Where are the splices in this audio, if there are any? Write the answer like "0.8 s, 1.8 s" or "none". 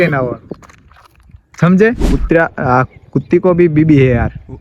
2.2 s